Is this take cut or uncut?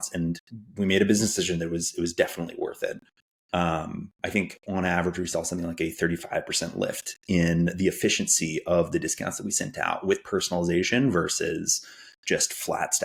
uncut